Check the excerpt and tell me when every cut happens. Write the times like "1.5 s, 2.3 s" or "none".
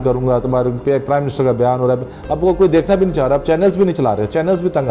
none